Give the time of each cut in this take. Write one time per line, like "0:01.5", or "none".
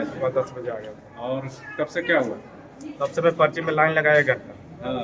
none